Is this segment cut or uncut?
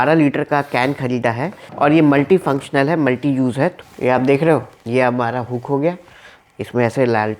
cut